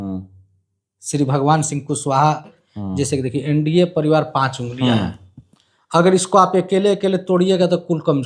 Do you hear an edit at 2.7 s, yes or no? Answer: yes